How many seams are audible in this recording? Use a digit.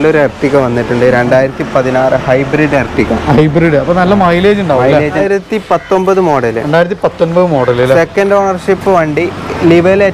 1